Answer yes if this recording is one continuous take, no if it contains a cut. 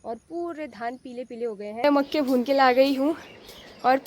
no